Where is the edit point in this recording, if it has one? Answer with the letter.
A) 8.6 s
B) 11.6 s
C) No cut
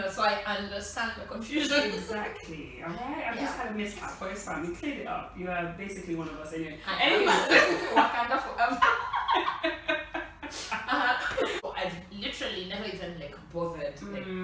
B